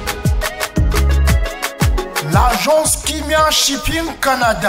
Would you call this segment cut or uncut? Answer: cut